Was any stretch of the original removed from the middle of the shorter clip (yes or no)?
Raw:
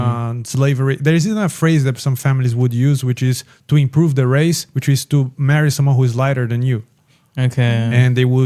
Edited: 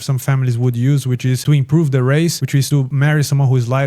yes